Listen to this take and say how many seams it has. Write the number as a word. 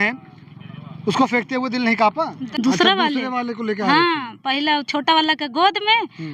one